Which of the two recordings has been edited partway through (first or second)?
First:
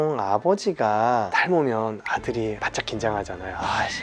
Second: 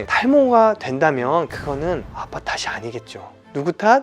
first